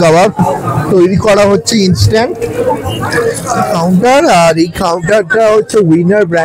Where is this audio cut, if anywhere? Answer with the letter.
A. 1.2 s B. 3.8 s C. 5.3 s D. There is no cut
B